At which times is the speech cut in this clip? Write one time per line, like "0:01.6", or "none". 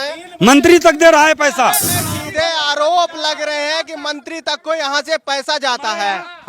0:01.9